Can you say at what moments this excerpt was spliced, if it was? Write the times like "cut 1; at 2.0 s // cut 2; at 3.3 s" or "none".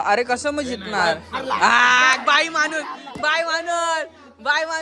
none